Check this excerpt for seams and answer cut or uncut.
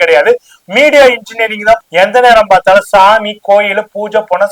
cut